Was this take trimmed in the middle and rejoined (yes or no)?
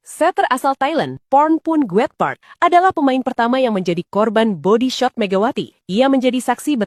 no